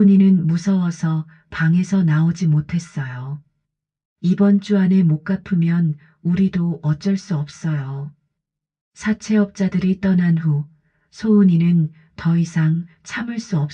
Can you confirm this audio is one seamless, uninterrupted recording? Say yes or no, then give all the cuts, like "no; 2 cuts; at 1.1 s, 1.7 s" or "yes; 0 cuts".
yes; 0 cuts